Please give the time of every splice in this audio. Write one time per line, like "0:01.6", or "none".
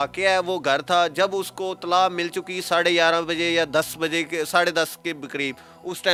none